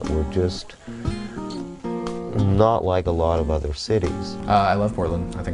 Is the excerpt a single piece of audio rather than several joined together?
yes; 0 cuts

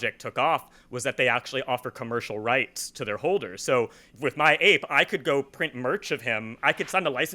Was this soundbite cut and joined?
yes; 2 cuts; at 4.0 s, 6.6 s

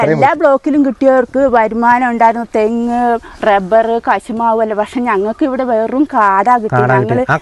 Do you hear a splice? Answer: no; 0 cuts

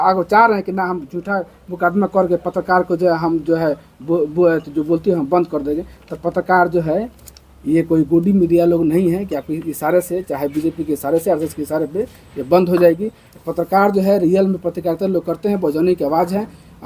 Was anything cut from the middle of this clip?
no; 0 cuts

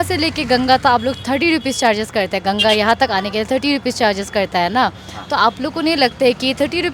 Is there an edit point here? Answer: no; 0 cuts

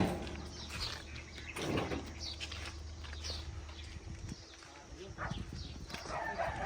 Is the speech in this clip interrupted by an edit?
no; 0 cuts

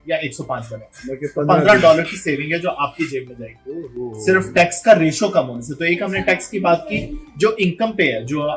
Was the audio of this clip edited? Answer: no; 0 cuts

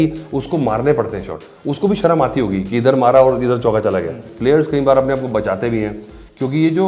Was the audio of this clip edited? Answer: yes; 1 cut; at 4.2 s

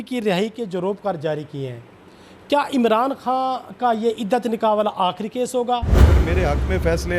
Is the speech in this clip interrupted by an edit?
yes; 1 cut; at 6.2 s

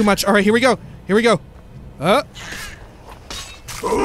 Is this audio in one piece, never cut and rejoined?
yes; 0 cuts

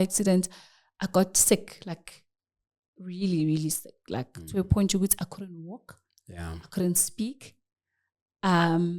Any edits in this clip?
no; 0 cuts

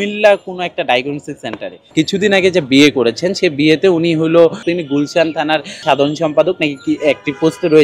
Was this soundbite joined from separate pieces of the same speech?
yes; 3 cuts; at 1.9 s, 4.6 s, 5.8 s

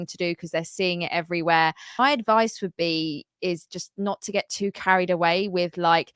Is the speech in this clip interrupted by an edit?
yes; 1 cut; at 2.0 s

